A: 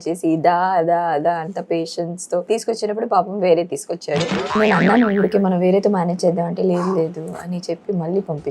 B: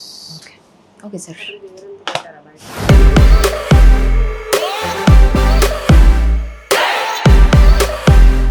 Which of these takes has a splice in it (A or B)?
A